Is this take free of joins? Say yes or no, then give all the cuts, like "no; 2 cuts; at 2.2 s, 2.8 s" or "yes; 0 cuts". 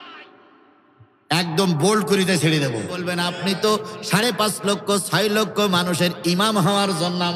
no; 1 cut; at 3.1 s